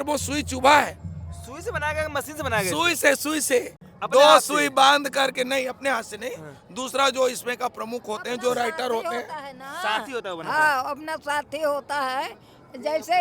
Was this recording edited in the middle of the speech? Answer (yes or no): no